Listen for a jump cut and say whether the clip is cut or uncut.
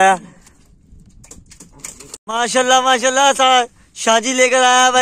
uncut